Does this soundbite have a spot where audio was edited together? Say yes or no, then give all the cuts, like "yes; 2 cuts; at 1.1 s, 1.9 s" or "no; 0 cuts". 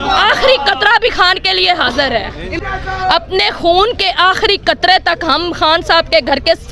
yes; 1 cut; at 2.5 s